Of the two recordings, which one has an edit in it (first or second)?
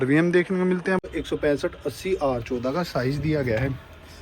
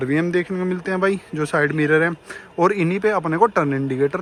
first